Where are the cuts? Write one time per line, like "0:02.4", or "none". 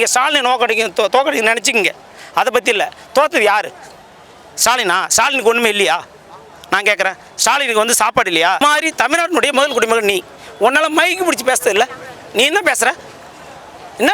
0:08.6